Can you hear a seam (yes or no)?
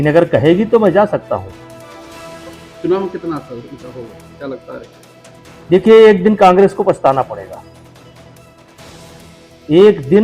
no